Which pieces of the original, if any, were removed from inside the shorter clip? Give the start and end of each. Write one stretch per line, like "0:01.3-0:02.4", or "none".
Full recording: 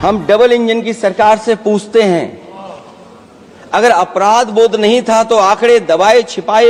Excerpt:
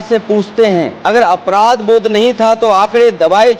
0:02.3-0:03.6